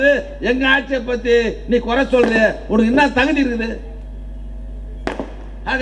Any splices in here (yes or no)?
no